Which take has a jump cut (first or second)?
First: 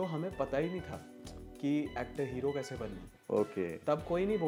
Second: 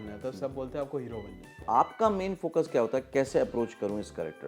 second